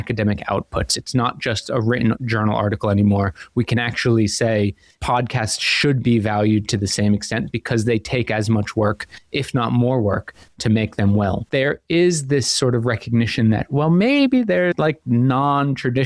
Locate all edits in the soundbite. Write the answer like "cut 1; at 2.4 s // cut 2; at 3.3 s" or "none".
cut 1; at 11.4 s // cut 2; at 14.7 s